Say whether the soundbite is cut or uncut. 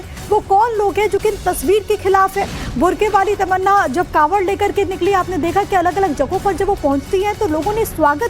cut